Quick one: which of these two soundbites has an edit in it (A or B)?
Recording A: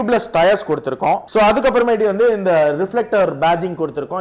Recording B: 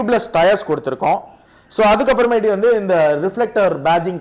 A